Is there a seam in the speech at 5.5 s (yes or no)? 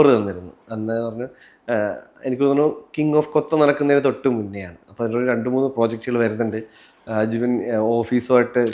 no